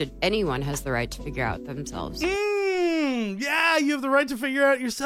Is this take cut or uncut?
uncut